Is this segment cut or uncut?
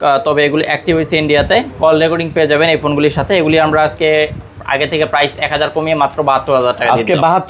uncut